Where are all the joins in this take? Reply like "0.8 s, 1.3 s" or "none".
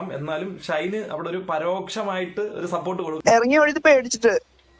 3.2 s